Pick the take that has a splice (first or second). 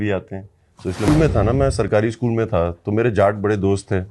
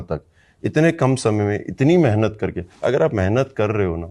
first